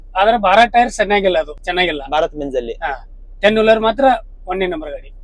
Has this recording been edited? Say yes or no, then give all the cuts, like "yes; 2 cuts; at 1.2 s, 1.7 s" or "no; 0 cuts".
yes; 1 cut; at 1.6 s